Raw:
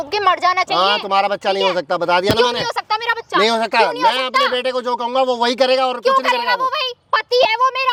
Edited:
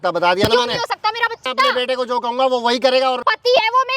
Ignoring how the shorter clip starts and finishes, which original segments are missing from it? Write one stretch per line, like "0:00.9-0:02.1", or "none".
0:03.3-0:04.2
0:06.0-0:07.1